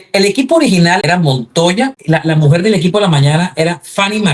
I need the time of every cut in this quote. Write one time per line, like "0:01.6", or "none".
0:01.0
0:02.0